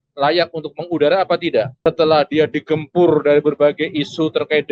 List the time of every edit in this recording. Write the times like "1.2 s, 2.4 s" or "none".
1.7 s